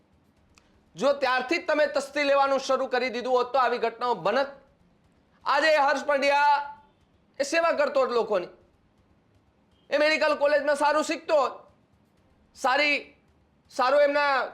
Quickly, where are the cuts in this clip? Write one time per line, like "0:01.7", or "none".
none